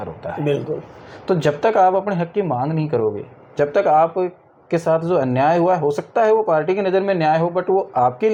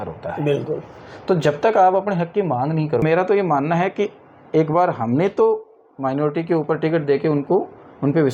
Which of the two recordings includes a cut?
second; 1 cut; at 3.0 s

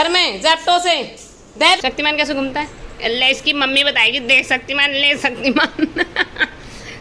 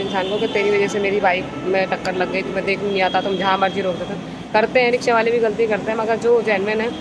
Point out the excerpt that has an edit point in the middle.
first; 1 cut; at 1.8 s

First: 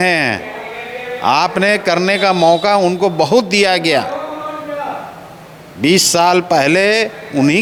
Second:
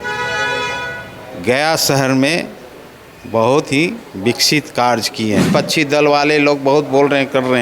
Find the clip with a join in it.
second; 1 cut; at 5.5 s

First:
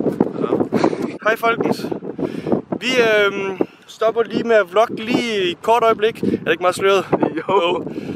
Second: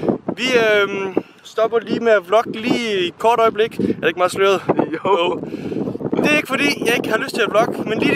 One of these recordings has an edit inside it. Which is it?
first; 1 cut; at 1.2 s

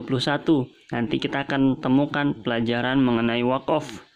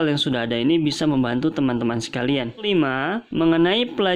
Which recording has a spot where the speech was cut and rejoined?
second; 1 cut; at 2.6 s

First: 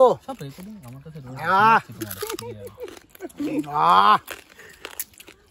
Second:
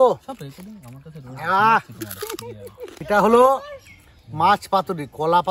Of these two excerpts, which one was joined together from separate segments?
second; 1 cut; at 2.9 s

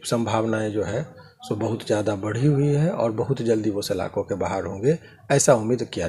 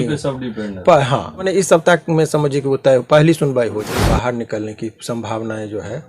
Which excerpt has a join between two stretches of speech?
second; 2 cuts; at 1.5 s, 4.0 s

